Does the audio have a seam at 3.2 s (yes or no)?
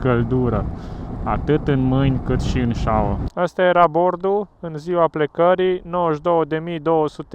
yes